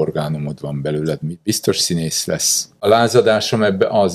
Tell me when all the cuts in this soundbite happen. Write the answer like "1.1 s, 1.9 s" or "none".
2.8 s